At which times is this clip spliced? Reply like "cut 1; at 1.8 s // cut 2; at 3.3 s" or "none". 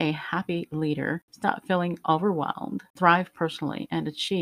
cut 1; at 1.3 s // cut 2; at 2.8 s

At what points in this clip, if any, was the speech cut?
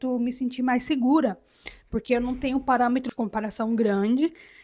cut 1; at 3.1 s

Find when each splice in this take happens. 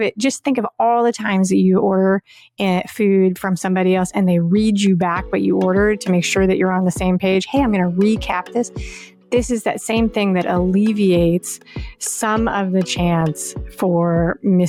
none

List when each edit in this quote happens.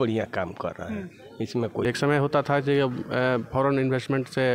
cut 1; at 1.8 s

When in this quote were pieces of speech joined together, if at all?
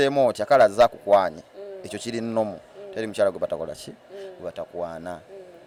none

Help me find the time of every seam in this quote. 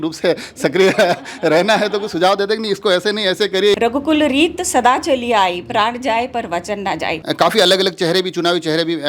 cut 1; at 3.7 s // cut 2; at 7.2 s

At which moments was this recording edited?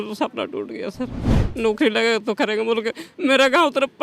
cut 1; at 1.4 s

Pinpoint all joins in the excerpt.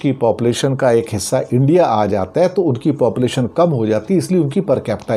none

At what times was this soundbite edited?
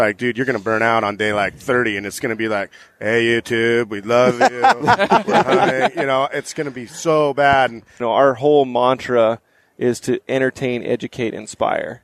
cut 1; at 7.9 s

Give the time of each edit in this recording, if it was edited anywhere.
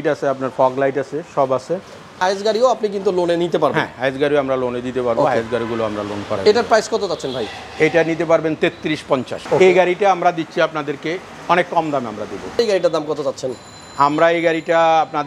cut 1; at 2.2 s // cut 2; at 9.3 s // cut 3; at 12.6 s

